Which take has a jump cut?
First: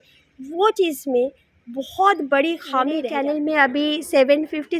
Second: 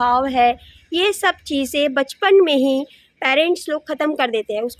first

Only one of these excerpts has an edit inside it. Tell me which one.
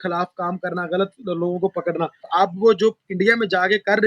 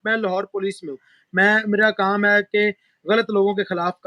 first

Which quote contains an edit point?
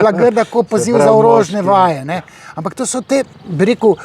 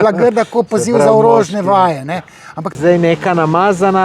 second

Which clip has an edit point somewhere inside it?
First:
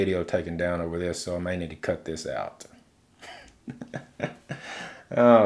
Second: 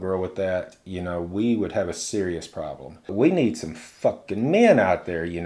second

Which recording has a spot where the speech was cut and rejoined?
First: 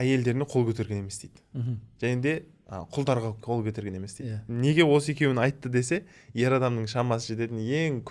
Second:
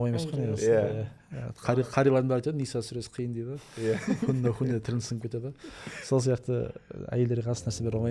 first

